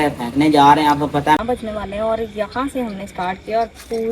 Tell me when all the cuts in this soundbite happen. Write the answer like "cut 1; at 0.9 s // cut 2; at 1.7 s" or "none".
cut 1; at 1.4 s

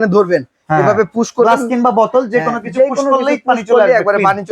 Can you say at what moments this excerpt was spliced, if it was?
none

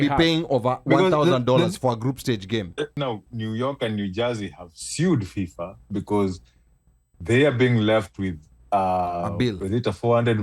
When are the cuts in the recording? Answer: cut 1; at 3.0 s

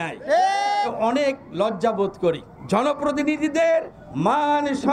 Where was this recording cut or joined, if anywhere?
cut 1; at 0.9 s // cut 2; at 2.5 s // cut 3; at 4.0 s

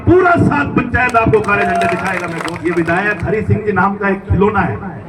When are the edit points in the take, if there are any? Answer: cut 1; at 2.5 s

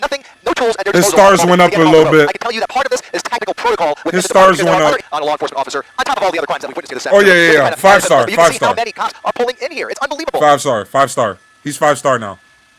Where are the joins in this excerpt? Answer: cut 1; at 5.1 s

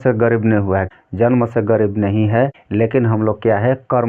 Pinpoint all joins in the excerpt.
cut 1; at 0.9 s // cut 2; at 2.6 s

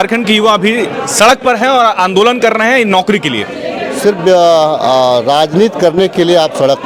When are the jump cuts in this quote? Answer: none

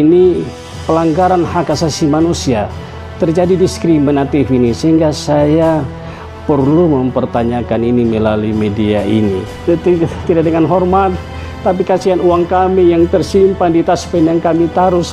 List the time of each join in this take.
cut 1; at 9.7 s

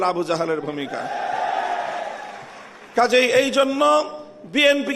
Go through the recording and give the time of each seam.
none

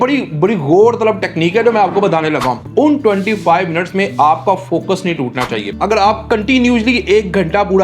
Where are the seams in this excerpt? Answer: cut 1; at 2.6 s // cut 2; at 5.7 s

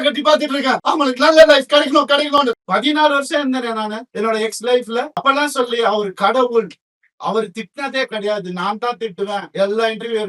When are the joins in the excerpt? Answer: cut 1; at 0.8 s // cut 2; at 2.5 s // cut 3; at 4.0 s // cut 4; at 5.1 s

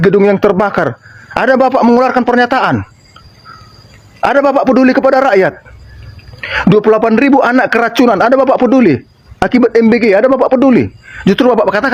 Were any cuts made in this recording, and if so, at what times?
none

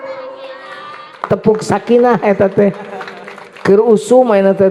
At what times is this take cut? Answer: cut 1; at 1.2 s

